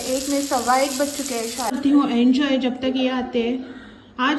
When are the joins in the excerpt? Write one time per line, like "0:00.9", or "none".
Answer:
0:01.8